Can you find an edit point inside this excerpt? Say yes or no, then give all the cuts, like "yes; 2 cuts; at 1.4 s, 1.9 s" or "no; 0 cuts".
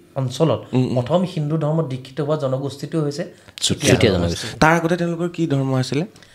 no; 0 cuts